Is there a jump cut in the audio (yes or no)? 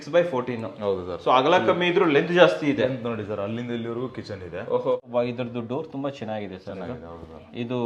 yes